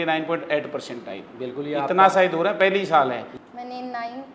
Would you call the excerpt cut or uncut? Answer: cut